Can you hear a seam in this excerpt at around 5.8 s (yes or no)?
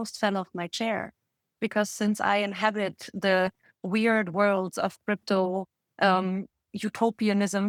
no